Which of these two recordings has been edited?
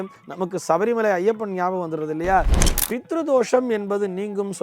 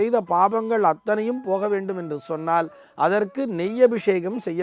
first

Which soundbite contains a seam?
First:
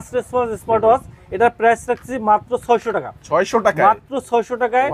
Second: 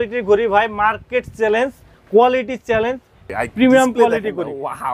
second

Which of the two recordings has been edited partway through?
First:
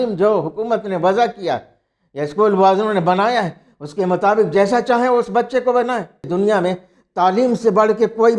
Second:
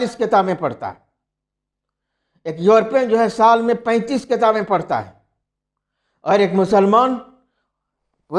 first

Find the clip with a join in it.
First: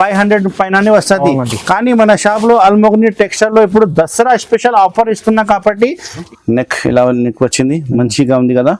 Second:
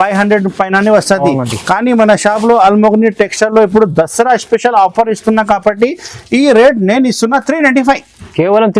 first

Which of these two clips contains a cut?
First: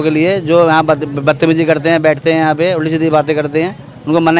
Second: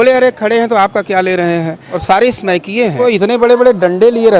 second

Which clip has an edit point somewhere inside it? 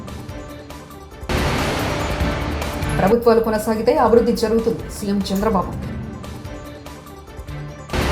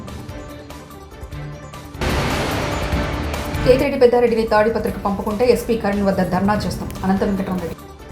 first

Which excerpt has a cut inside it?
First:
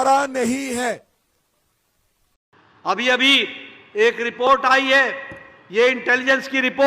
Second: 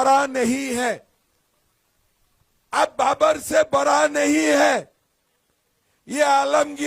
first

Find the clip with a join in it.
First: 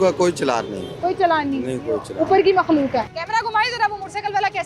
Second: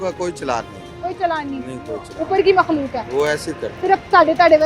first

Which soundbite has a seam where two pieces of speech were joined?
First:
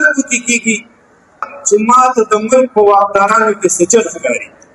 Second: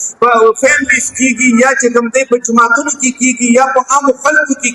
first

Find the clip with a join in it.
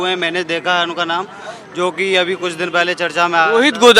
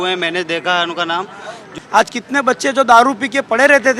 second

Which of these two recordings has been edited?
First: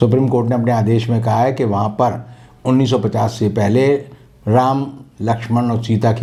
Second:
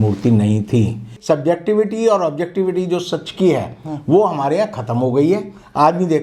second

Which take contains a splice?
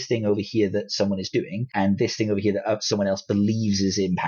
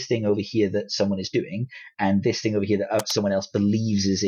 first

